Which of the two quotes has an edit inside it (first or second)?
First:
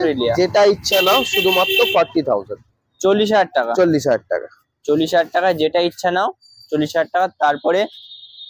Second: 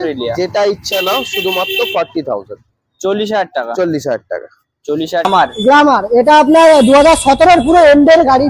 second